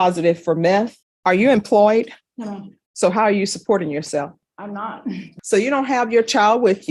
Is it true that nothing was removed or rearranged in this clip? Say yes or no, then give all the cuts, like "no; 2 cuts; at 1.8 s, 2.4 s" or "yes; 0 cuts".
no; 2 cuts; at 1.0 s, 5.3 s